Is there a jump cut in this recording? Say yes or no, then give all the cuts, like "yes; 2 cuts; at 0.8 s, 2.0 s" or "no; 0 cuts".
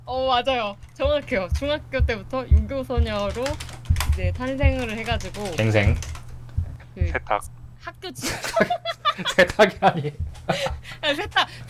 no; 0 cuts